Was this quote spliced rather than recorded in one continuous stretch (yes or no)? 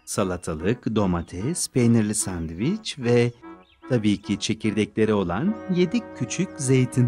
no